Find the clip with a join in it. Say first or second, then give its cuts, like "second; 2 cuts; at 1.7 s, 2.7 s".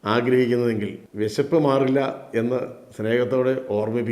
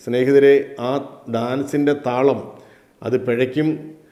first; 1 cut; at 1.0 s